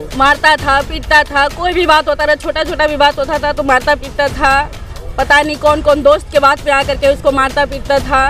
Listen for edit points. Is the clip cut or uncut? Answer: uncut